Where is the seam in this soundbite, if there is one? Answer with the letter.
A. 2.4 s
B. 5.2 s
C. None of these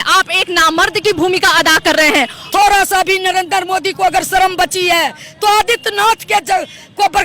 A